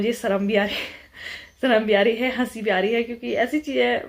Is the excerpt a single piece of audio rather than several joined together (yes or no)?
yes